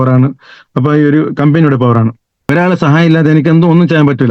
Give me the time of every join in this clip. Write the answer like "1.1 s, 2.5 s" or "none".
2.5 s

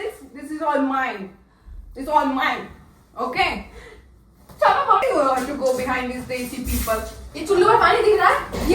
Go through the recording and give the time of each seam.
5.0 s

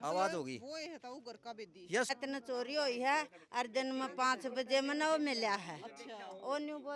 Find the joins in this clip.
2.1 s

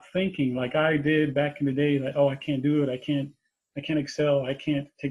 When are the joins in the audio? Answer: none

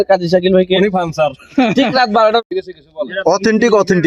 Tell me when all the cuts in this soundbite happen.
2.6 s

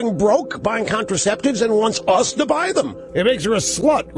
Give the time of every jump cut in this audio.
3.0 s

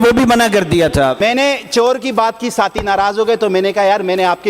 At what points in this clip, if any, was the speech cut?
1.2 s

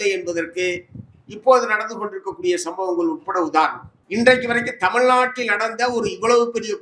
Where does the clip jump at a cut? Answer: 3.9 s

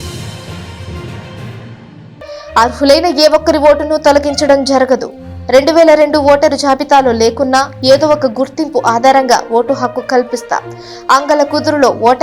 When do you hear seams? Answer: 2.2 s

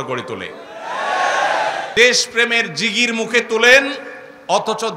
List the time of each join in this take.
1.8 s

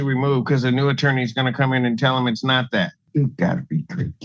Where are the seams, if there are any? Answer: 3.0 s

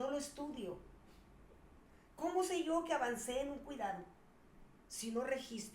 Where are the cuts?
1.8 s

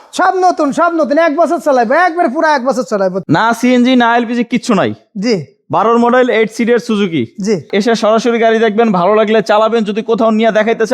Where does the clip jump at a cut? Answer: 3.2 s, 7.7 s

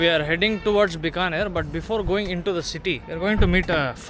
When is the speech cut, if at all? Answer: 3.1 s

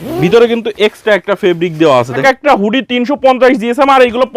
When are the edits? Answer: 2.2 s

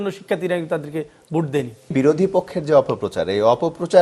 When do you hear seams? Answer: 1.9 s

